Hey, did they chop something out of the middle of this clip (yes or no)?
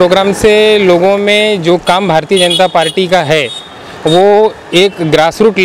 no